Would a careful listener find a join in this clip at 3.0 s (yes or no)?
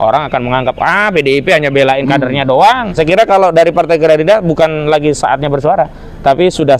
yes